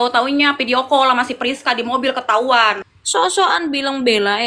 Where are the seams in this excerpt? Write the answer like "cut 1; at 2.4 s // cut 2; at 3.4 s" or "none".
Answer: cut 1; at 2.9 s